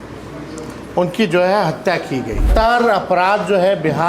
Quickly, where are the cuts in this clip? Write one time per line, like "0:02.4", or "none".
0:02.5